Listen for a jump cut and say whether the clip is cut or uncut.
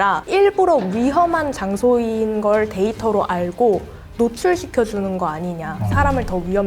uncut